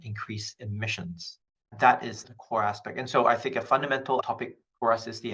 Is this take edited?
yes; 2 cuts; at 1.7 s, 4.2 s

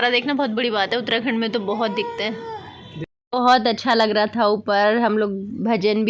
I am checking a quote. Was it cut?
no; 0 cuts

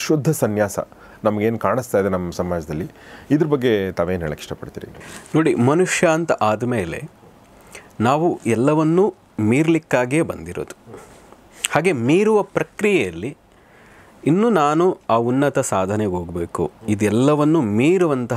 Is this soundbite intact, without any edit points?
yes; 0 cuts

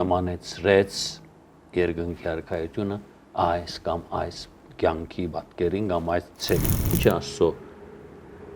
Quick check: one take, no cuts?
no; 1 cut; at 6.9 s

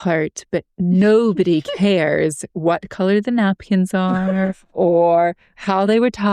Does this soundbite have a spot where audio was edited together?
no; 0 cuts

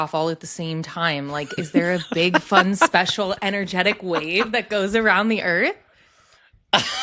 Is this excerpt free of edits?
yes; 0 cuts

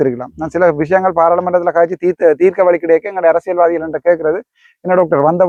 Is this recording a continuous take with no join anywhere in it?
yes; 0 cuts

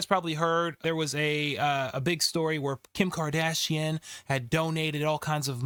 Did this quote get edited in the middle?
no; 0 cuts

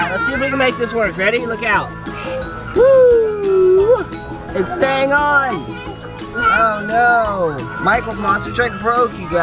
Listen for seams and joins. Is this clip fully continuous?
yes; 0 cuts

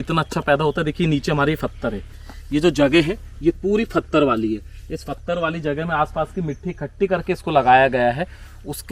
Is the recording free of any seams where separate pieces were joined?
yes; 0 cuts

